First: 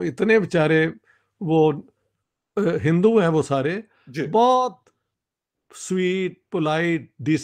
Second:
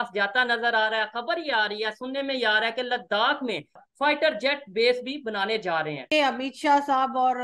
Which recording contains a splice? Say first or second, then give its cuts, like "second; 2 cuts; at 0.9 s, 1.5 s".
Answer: second; 2 cuts; at 3.8 s, 6.0 s